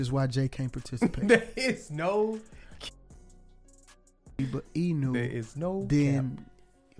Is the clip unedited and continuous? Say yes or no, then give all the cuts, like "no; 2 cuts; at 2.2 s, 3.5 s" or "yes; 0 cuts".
yes; 0 cuts